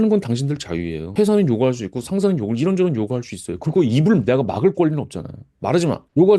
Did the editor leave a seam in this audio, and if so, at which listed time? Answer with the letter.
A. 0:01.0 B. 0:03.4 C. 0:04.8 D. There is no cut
A